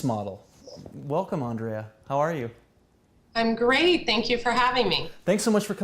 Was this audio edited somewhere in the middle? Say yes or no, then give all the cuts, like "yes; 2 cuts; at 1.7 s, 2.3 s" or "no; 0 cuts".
yes; 1 cut; at 0.9 s